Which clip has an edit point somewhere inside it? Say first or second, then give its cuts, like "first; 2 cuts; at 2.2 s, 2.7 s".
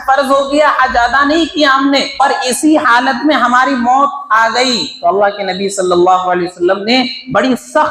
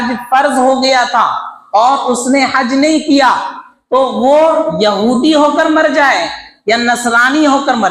first; 1 cut; at 2.2 s